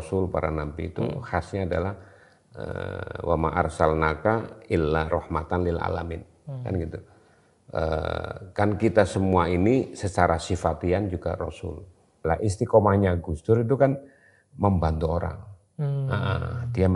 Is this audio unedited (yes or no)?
no